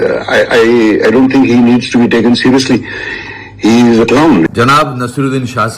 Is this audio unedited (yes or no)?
no